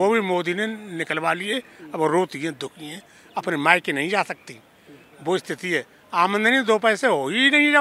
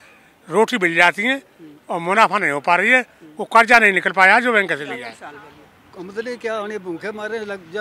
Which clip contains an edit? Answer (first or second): second